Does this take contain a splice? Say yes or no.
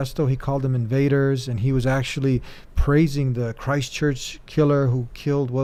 no